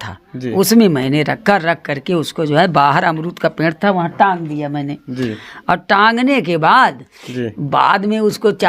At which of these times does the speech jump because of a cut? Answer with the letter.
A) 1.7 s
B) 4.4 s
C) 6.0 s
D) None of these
D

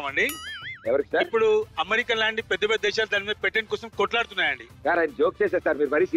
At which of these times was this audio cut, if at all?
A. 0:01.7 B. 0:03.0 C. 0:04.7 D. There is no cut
C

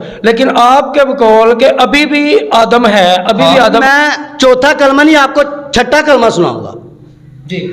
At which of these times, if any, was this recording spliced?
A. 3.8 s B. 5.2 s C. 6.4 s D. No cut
A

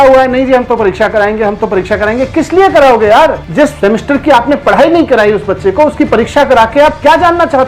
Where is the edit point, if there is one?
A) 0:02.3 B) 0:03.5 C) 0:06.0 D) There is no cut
B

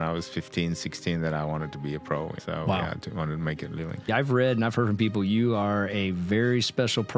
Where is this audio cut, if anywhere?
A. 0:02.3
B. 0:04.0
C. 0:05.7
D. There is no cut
B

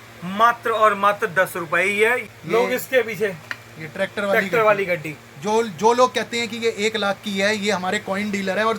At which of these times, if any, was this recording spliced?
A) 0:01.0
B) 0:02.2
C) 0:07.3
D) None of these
B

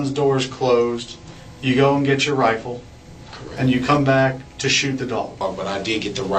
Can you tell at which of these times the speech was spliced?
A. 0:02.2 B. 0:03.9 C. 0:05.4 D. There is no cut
C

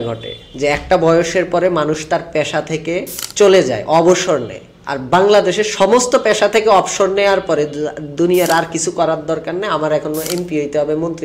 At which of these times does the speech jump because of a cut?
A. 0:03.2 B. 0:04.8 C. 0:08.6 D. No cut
A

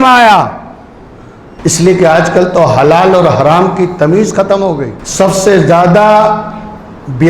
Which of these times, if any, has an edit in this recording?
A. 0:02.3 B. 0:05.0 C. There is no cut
B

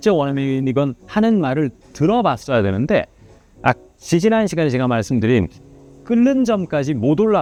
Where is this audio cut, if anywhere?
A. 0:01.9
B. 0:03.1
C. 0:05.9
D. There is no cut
D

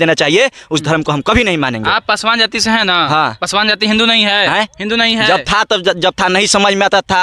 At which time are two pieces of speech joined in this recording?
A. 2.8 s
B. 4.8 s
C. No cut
C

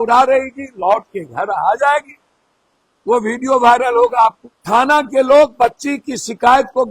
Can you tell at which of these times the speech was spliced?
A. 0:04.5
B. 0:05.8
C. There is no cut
A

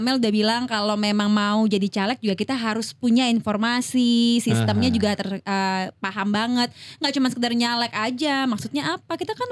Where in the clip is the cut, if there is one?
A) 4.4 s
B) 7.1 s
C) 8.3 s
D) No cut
D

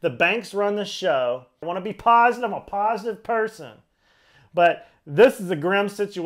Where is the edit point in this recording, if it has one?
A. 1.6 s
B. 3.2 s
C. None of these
A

